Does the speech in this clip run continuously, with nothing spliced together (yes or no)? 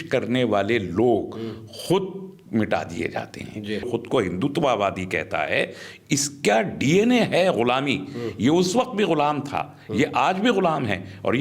no